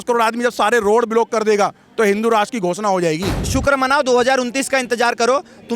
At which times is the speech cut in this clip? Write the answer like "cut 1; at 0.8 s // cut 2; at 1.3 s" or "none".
cut 1; at 3.4 s